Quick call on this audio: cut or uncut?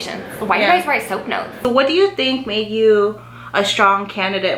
cut